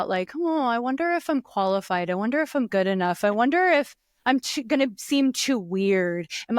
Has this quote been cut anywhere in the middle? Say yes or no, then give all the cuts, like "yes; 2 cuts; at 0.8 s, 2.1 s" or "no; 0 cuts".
no; 0 cuts